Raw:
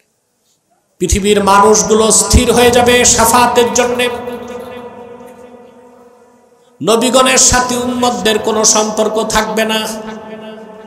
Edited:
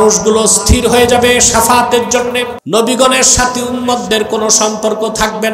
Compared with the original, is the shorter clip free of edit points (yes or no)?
no